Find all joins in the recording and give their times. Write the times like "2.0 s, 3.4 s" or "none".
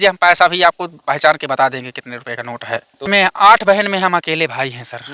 3.1 s